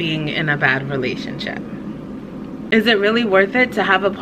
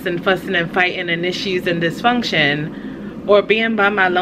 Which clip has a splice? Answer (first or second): first